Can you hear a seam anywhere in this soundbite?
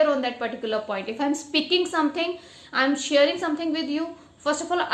no; 0 cuts

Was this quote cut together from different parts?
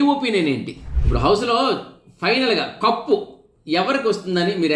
yes; 1 cut; at 1.0 s

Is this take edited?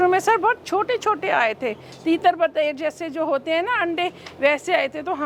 no; 0 cuts

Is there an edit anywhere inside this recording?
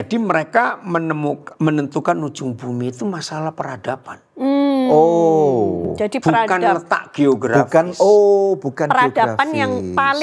no; 0 cuts

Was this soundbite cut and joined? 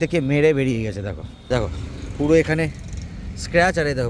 no; 0 cuts

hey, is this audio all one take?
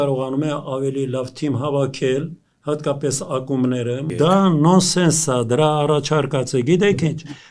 no; 1 cut; at 4.1 s

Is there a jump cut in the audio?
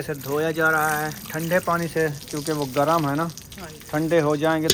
no; 0 cuts

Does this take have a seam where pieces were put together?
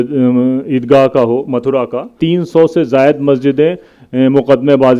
yes; 1 cut; at 2.2 s

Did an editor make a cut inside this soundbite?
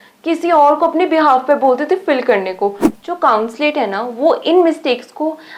yes; 1 cut; at 2.9 s

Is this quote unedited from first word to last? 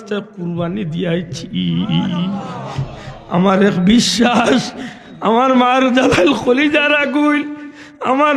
yes; 0 cuts

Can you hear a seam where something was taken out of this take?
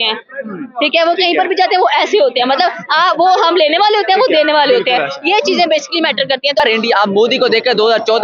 yes; 1 cut; at 6.6 s

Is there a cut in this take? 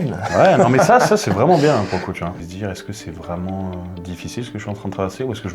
yes; 1 cut; at 2.4 s

